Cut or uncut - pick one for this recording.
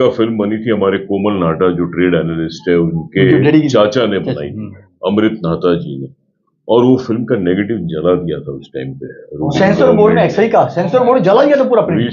uncut